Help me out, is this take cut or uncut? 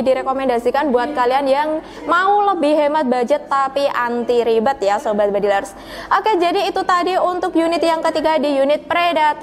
uncut